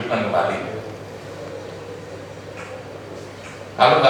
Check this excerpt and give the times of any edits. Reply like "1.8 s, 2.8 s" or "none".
none